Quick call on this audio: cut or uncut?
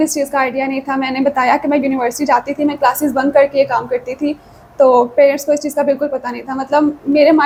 uncut